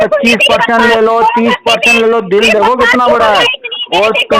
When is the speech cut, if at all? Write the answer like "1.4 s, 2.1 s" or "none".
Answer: none